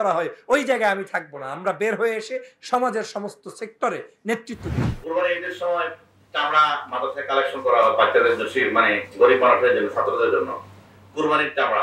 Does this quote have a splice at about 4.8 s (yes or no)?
yes